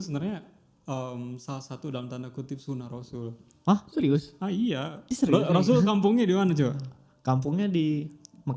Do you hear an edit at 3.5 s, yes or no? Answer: no